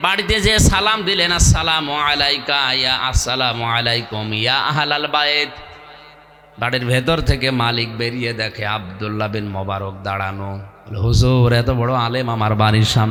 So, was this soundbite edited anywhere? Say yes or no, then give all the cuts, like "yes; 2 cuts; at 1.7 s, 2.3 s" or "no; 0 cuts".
no; 0 cuts